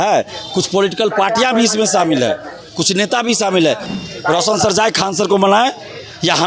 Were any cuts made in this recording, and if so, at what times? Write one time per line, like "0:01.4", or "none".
0:03.9